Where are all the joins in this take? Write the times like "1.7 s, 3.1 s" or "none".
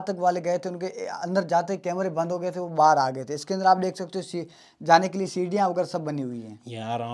none